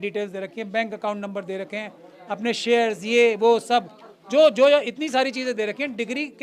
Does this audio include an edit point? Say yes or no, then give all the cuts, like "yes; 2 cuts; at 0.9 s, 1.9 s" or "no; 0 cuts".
no; 0 cuts